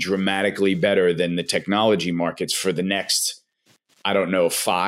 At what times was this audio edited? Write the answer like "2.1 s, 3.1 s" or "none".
none